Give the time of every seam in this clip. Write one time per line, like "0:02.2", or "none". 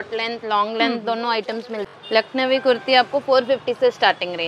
none

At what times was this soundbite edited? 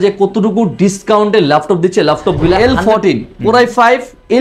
0:02.6

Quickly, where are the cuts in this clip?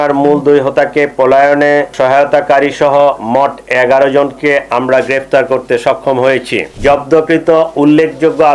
0:01.9
0:06.7

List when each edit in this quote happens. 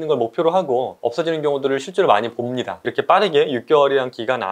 0:01.0
0:02.9

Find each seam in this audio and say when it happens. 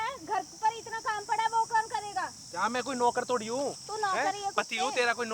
none

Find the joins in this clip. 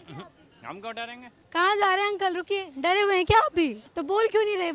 0:01.4
0:03.9

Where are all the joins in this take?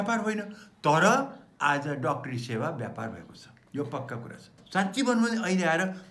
0:04.6

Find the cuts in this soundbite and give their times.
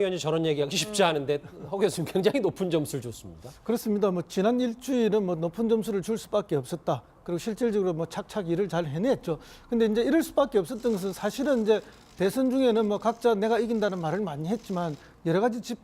0:09.9

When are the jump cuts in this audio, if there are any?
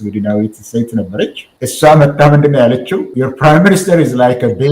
0:03.1

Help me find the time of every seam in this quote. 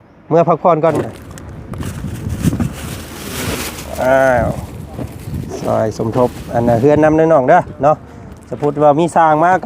0:01.0

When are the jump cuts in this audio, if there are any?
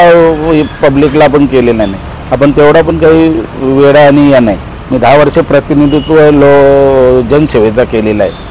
none

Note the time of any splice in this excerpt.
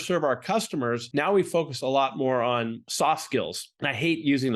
0:01.0
0:02.8
0:03.6

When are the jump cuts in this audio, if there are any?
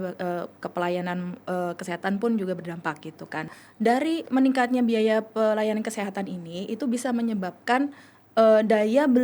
0:03.5

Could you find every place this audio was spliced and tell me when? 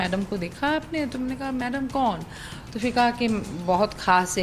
0:03.5

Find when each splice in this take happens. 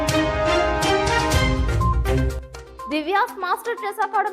0:02.8

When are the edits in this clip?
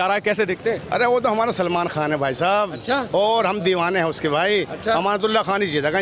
none

